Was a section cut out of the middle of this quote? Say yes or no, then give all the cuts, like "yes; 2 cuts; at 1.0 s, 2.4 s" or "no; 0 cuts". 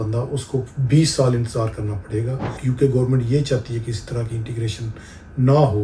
yes; 1 cut; at 2.5 s